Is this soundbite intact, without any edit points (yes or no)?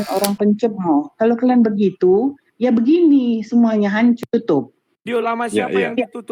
yes